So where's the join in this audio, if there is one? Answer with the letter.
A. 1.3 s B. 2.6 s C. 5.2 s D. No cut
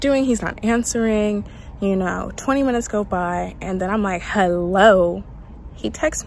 D